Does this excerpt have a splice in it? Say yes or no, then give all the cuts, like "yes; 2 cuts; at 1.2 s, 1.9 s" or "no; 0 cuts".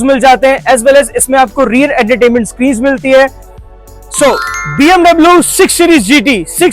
yes; 1 cut; at 3.4 s